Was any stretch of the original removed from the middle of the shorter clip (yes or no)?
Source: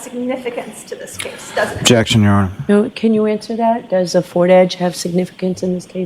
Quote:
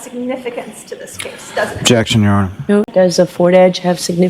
yes